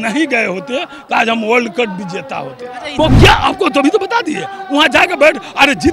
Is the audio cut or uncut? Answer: cut